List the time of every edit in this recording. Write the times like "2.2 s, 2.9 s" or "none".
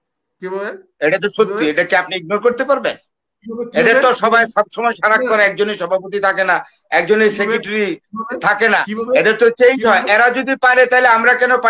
none